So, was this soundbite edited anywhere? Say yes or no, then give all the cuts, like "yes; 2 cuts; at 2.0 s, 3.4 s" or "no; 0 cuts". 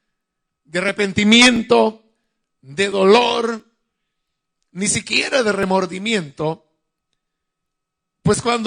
no; 0 cuts